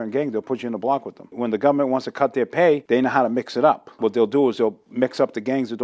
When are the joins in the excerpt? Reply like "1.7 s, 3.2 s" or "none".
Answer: 1.3 s, 2.8 s, 3.9 s